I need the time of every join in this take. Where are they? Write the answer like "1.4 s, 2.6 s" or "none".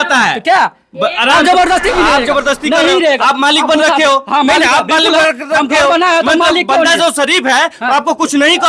1.9 s